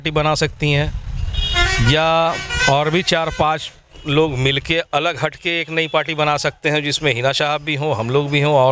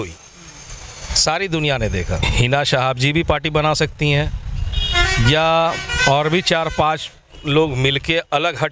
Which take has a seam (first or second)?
second